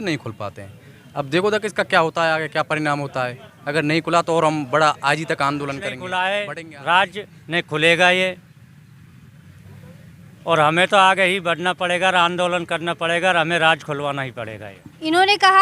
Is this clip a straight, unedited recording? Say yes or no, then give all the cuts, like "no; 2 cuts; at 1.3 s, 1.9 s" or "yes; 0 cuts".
no; 1 cut; at 6.0 s